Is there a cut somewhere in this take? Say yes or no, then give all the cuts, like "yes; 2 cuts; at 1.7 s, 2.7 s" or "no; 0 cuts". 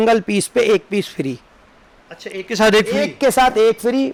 no; 0 cuts